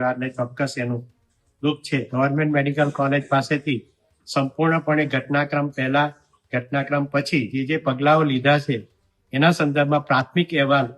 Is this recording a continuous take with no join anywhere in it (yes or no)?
no